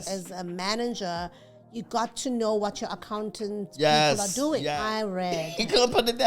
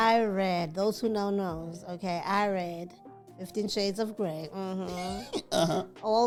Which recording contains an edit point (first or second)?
first